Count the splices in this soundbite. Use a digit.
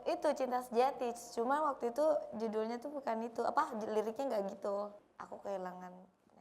1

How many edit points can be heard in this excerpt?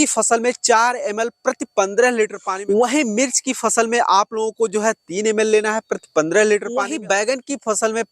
2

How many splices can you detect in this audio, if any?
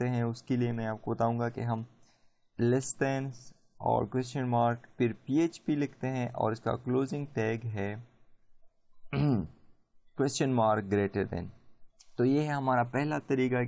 1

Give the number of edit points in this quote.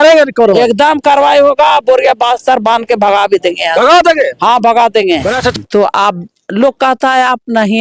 1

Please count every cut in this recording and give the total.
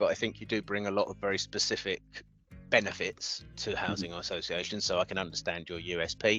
0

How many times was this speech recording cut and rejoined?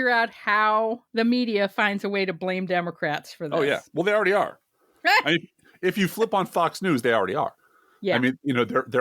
1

